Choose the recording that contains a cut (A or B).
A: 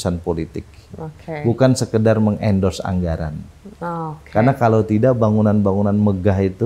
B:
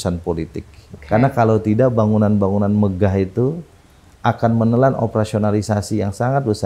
B